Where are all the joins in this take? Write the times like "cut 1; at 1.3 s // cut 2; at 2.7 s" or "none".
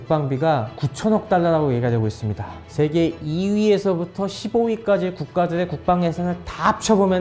cut 1; at 2.6 s